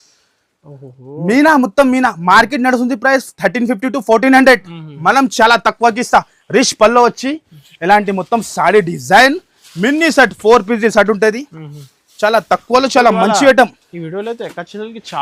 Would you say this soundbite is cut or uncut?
uncut